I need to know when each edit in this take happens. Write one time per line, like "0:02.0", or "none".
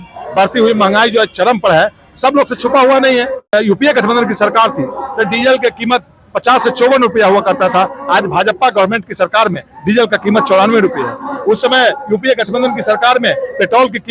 0:03.5